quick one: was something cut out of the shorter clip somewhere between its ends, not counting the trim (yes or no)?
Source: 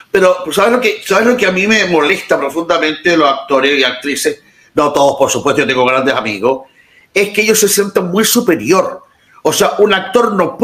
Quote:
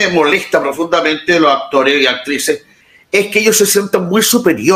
yes